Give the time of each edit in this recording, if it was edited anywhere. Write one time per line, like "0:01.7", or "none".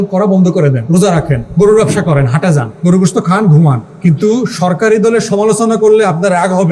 0:00.9
0:02.7
0:03.9